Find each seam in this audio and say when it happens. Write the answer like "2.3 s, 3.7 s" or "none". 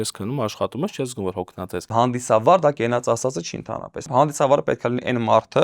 1.9 s, 4.1 s